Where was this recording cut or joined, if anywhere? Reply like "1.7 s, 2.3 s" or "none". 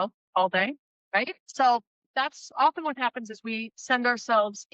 1.4 s